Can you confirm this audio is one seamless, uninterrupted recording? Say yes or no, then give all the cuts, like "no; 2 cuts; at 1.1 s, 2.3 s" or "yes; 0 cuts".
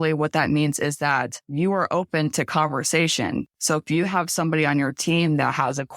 no; 1 cut; at 3.5 s